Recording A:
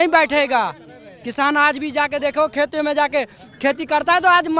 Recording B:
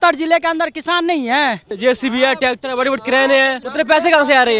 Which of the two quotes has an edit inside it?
B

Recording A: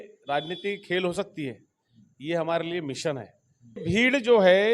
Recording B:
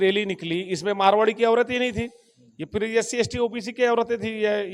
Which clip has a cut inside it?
A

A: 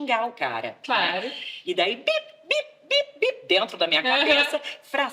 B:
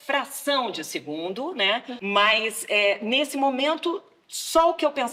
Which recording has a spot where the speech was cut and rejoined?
B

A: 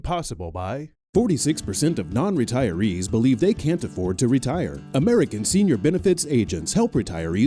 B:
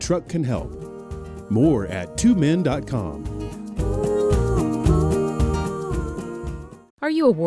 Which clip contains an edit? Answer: A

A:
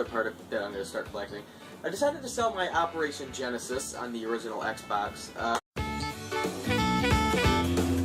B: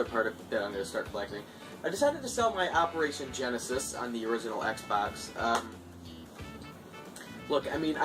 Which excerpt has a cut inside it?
B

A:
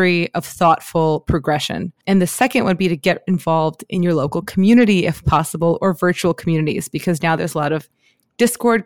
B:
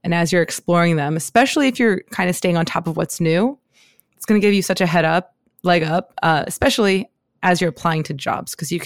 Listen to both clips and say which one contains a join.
A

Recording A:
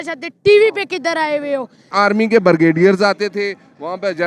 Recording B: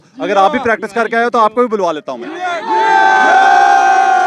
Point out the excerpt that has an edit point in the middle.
A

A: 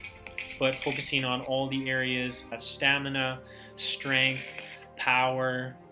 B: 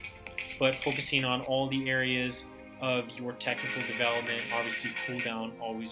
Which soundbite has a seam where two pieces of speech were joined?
A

